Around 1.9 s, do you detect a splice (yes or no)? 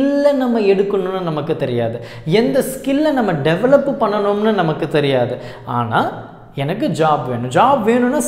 no